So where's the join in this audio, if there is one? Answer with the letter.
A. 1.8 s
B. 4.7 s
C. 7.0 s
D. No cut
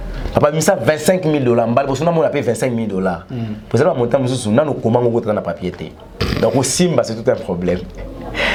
D